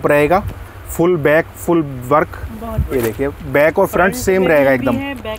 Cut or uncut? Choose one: uncut